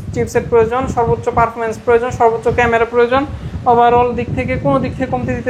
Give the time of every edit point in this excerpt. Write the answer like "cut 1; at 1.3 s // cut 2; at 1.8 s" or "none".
none